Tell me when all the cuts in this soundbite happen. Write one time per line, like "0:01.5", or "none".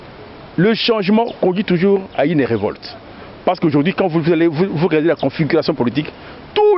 none